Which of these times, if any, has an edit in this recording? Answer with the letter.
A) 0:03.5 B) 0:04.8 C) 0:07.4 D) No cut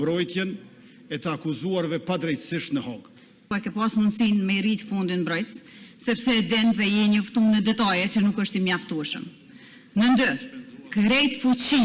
A